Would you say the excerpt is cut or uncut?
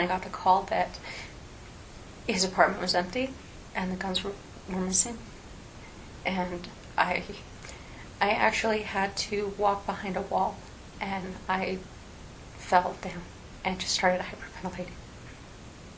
cut